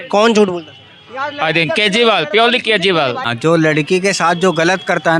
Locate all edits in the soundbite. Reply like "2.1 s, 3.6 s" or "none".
3.3 s